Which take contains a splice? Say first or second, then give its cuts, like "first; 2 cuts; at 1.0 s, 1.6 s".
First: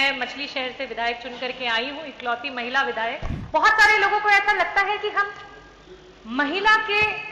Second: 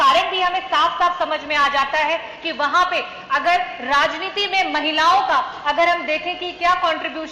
first; 1 cut; at 3.3 s